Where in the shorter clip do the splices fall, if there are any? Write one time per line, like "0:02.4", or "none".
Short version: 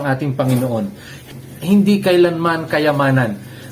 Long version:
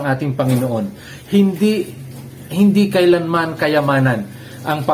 0:01.1